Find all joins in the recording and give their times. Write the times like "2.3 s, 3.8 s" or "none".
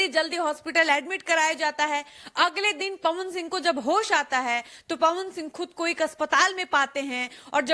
none